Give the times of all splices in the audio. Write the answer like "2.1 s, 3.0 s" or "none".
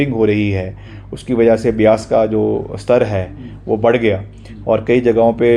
none